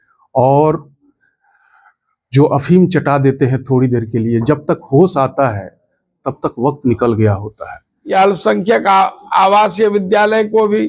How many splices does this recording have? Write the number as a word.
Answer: one